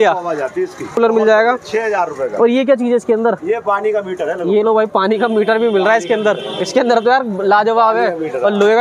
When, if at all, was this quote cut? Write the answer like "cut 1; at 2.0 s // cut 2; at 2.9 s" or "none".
cut 1; at 0.9 s

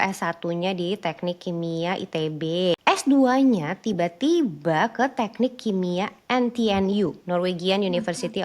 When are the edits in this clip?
cut 1; at 2.8 s

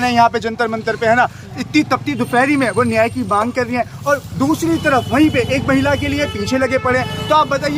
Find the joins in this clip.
none

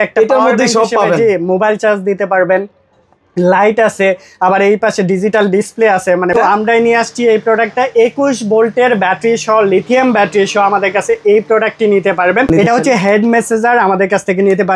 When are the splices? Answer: cut 1; at 6.5 s // cut 2; at 12.5 s

